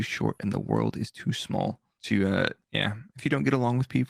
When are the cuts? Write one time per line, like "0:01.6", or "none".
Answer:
0:01.9
0:02.6